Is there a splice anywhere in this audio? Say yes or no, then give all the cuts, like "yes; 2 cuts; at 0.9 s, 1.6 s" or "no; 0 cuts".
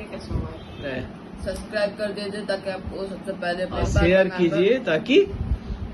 yes; 2 cuts; at 0.9 s, 3.8 s